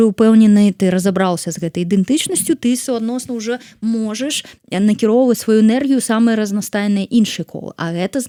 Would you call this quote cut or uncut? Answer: uncut